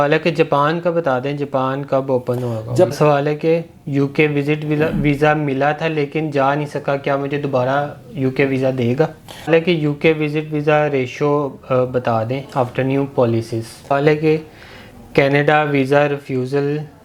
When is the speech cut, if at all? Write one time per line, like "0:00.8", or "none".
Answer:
0:02.9
0:09.5
0:13.9